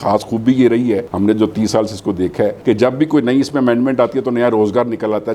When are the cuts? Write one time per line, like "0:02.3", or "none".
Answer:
none